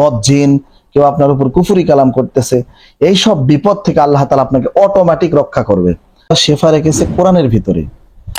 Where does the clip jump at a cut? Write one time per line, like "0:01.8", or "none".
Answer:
0:06.4